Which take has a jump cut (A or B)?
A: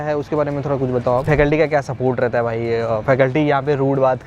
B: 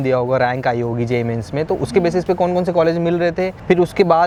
A